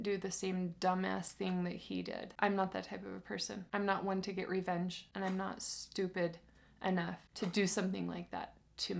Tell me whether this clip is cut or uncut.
cut